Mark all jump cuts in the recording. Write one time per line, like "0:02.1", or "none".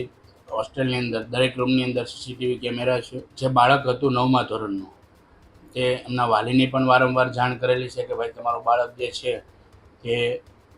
0:03.2